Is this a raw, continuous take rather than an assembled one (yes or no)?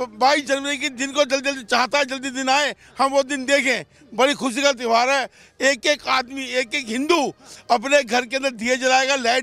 yes